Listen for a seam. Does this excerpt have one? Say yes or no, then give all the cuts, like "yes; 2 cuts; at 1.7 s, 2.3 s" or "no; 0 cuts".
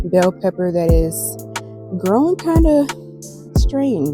no; 0 cuts